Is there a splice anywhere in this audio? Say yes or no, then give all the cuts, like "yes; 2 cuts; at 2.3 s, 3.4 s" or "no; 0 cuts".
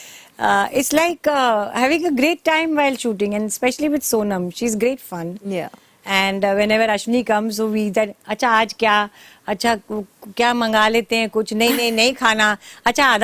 no; 0 cuts